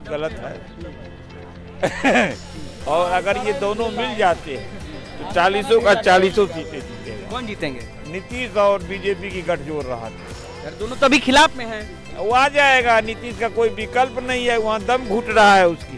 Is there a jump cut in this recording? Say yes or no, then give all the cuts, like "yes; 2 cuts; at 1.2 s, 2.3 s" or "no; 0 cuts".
no; 0 cuts